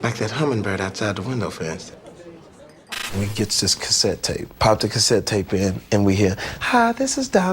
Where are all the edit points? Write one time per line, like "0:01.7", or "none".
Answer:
0:03.0

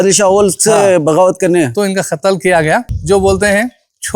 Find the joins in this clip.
0:02.6

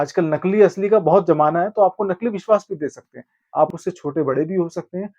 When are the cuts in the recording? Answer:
0:03.4

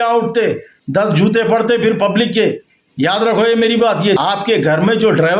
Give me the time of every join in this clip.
0:04.2

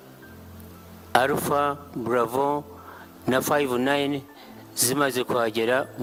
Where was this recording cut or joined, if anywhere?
none

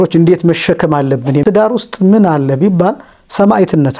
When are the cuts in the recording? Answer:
0:01.4

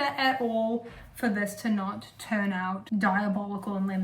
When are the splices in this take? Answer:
0:02.8

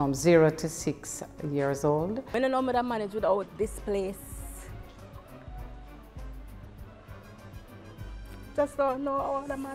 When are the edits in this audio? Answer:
0:02.3

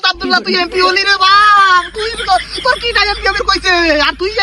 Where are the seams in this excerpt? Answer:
none

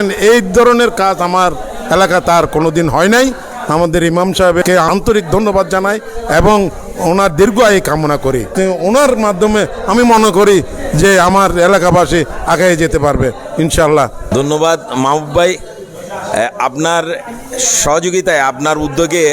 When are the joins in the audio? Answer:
0:04.9
0:14.3

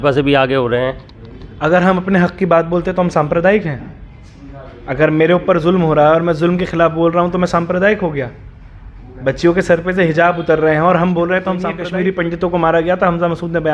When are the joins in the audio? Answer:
0:11.8

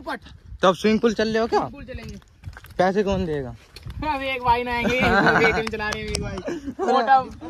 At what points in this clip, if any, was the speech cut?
none

